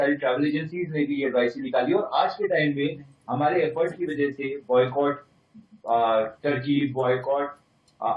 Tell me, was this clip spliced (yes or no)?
no